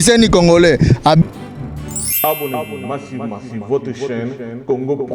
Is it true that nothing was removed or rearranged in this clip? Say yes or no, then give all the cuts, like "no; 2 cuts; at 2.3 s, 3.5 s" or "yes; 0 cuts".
no; 1 cut; at 1.2 s